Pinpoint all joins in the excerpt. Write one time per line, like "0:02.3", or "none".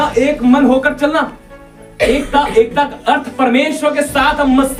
none